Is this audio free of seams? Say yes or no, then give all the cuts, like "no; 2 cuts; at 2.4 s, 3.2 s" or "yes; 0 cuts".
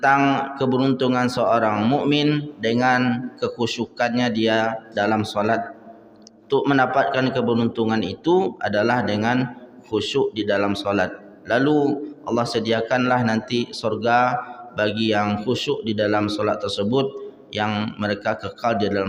yes; 0 cuts